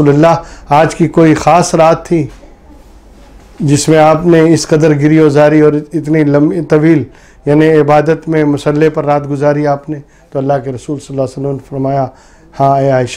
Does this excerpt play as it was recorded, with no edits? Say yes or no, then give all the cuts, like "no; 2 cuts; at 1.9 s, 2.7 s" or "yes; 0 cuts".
yes; 0 cuts